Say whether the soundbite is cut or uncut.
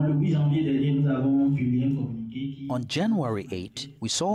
uncut